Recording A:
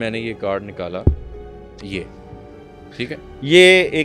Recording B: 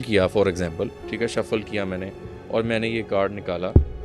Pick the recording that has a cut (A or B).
B